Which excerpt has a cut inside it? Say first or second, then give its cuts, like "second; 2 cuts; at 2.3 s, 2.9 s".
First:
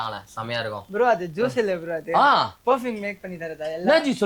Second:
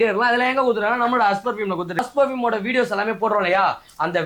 second; 1 cut; at 2.0 s